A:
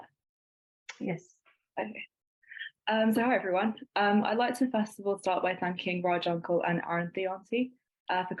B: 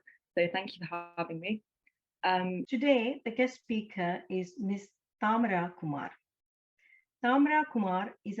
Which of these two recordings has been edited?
B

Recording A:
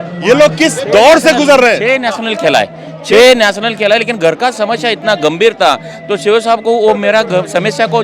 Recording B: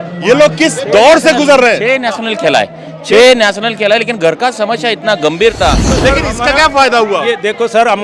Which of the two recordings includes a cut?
B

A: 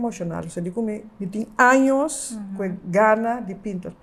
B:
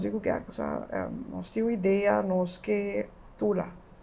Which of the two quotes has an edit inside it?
B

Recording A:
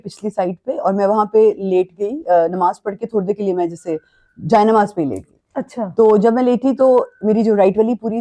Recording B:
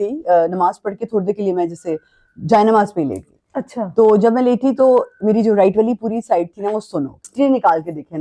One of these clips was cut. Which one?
B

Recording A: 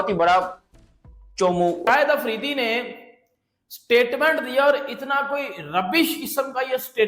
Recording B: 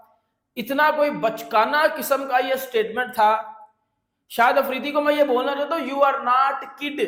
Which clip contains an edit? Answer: A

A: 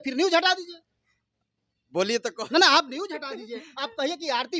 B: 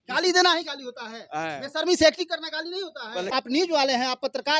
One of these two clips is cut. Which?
B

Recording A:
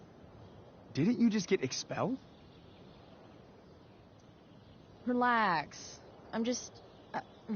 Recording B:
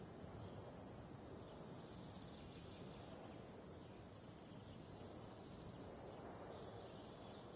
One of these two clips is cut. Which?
A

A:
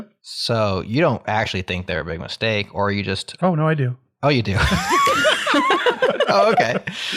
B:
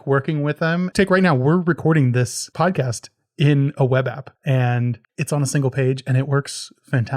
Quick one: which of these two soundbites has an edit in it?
B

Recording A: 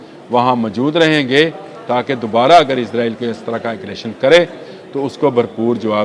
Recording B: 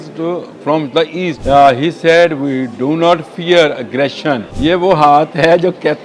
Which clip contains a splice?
B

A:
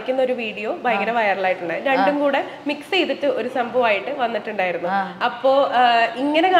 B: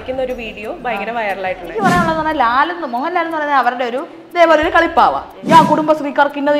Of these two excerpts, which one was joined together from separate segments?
B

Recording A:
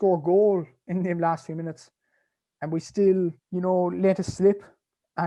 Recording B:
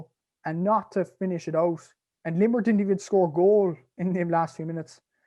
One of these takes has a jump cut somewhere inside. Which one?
A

